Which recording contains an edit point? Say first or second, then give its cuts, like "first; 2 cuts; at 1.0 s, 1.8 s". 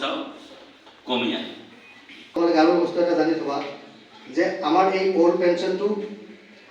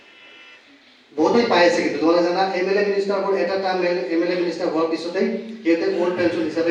first; 1 cut; at 2.4 s